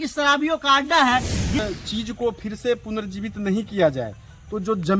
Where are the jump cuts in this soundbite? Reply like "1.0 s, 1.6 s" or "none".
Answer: 1.6 s